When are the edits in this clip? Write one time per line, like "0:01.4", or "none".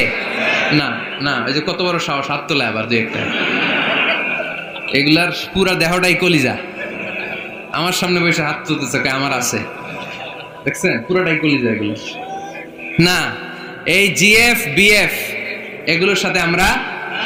none